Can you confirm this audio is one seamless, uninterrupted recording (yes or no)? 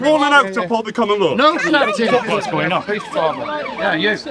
no